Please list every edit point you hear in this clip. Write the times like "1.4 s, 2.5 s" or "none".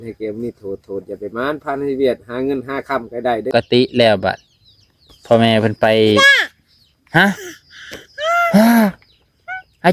3.5 s